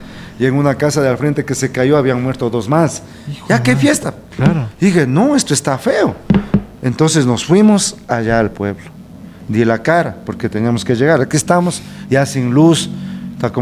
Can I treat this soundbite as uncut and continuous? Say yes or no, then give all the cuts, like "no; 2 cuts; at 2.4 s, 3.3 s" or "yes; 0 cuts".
yes; 0 cuts